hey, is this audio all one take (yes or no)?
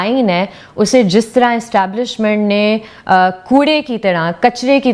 yes